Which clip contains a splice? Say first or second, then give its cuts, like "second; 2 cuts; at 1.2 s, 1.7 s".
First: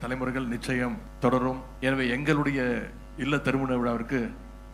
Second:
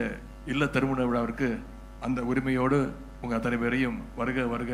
first; 2 cuts; at 1.1 s, 1.7 s